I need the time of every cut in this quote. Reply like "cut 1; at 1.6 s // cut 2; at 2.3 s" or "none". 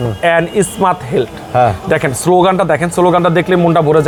none